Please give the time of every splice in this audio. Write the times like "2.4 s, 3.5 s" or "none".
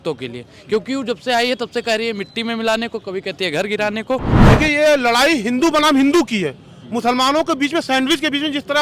4.3 s